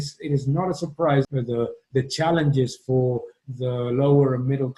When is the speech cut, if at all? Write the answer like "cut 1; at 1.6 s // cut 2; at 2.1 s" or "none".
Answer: cut 1; at 1.3 s